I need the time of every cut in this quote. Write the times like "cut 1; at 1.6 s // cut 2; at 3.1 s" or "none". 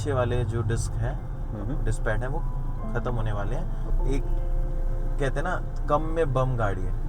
cut 1; at 3.9 s